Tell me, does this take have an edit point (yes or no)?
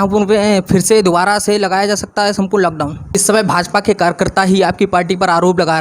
yes